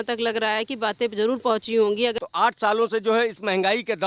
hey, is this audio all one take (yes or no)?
no